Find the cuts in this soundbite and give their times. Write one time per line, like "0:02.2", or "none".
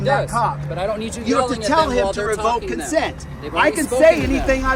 none